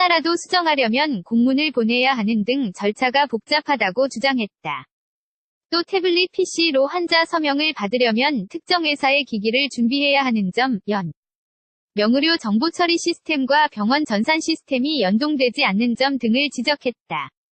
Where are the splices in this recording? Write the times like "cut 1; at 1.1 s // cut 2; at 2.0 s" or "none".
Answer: none